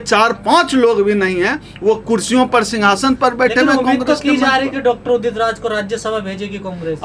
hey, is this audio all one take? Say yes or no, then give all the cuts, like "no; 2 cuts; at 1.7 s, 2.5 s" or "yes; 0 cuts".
yes; 0 cuts